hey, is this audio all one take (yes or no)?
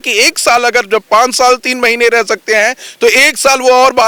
yes